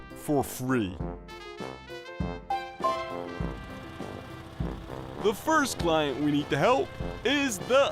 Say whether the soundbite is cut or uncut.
cut